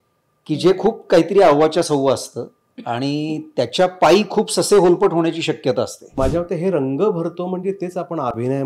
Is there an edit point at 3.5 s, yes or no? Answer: no